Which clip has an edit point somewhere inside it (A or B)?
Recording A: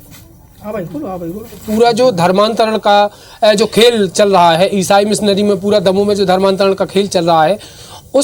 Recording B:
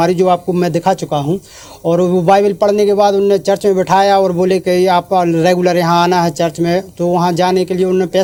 A